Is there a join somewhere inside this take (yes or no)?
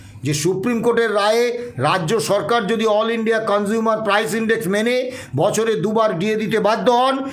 no